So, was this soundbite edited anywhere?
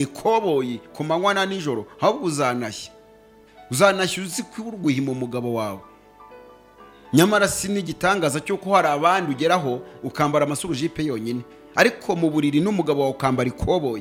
no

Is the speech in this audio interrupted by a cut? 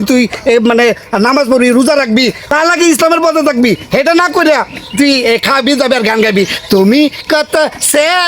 yes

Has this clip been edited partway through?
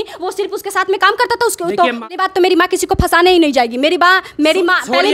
yes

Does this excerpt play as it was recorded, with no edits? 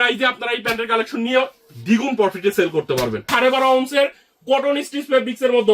no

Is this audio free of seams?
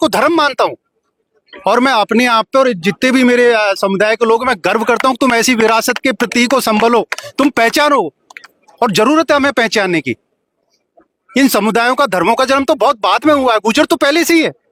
yes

